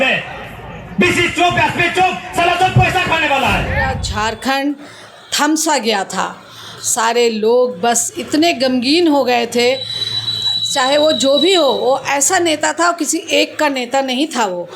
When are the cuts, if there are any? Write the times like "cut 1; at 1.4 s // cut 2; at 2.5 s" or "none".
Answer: cut 1; at 4.0 s